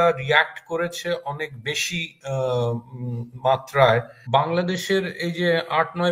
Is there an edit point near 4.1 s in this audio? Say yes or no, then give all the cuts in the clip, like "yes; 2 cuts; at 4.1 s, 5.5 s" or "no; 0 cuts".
yes; 1 cut; at 4.1 s